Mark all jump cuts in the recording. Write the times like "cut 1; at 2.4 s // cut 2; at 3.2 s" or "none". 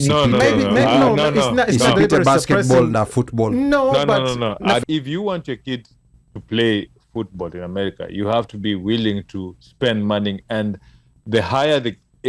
cut 1; at 4.8 s

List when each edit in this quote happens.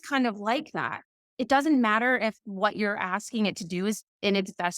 none

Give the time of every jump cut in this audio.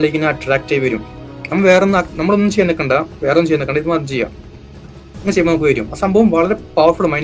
none

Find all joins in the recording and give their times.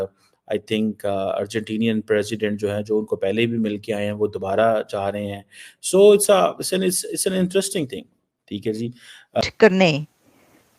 cut 1; at 9.4 s

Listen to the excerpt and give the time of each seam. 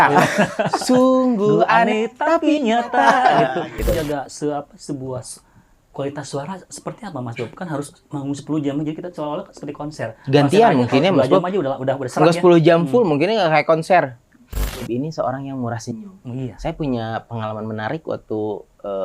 cut 1; at 3.9 s // cut 2; at 14.6 s

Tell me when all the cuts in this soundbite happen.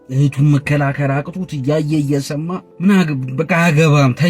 cut 1; at 2.7 s

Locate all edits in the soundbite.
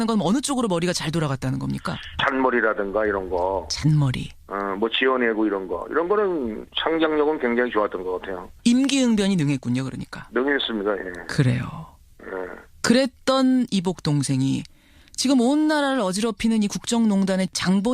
cut 1; at 3.7 s

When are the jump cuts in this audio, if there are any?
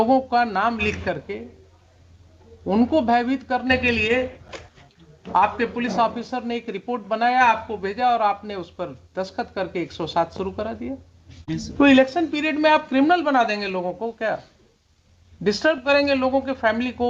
cut 1; at 11.5 s

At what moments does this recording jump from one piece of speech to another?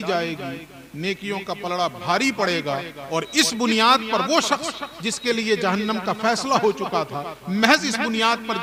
none

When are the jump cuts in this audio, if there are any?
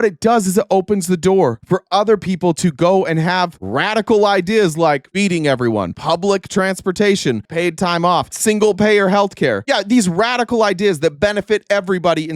cut 1; at 5.9 s // cut 2; at 7.4 s // cut 3; at 8.3 s

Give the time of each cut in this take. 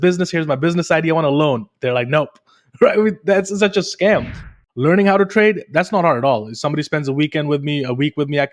cut 1; at 4.5 s

